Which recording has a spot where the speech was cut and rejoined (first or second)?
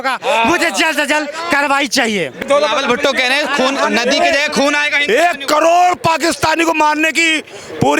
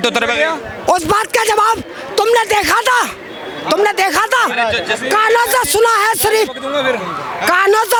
first